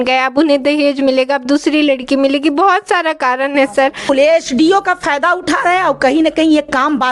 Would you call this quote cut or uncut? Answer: cut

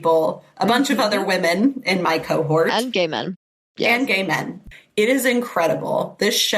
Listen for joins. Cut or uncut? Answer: cut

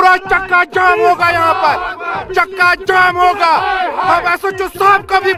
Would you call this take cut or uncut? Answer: uncut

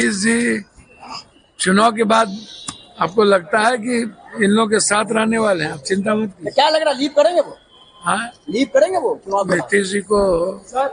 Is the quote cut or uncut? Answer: uncut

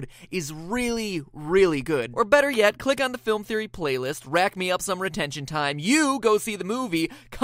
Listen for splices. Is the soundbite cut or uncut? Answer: uncut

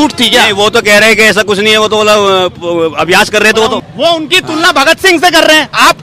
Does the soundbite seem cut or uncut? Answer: cut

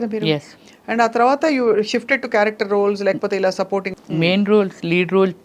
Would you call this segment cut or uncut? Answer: cut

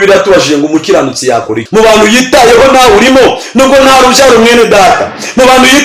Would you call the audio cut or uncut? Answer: cut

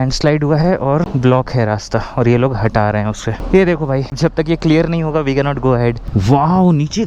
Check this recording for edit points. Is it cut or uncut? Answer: cut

